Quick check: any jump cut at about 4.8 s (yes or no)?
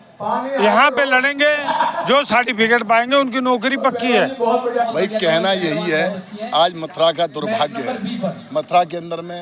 yes